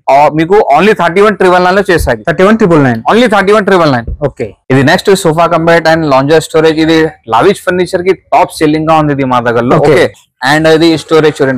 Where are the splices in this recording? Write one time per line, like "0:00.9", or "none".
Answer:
none